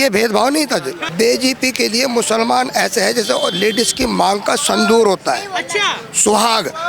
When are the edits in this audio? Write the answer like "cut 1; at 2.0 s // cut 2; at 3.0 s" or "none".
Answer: cut 1; at 1.0 s